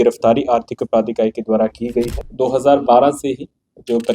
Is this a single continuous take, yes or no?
no